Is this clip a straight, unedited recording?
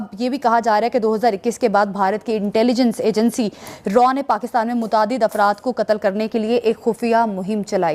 yes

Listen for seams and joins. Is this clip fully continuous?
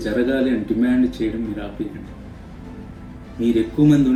yes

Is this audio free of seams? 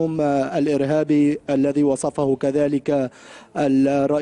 no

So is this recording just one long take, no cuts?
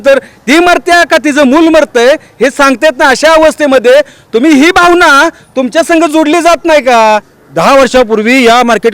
no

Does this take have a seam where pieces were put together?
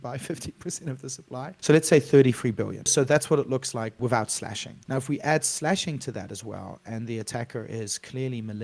yes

